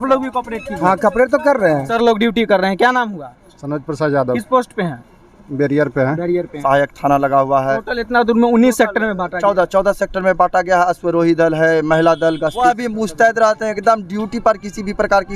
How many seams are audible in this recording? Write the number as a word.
three